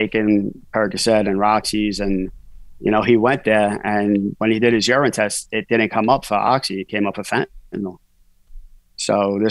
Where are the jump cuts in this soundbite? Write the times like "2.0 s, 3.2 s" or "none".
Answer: none